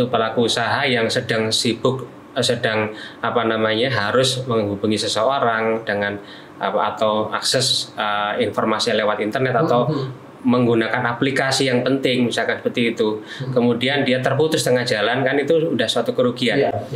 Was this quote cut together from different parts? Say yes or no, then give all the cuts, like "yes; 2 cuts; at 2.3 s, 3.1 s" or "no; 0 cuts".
no; 0 cuts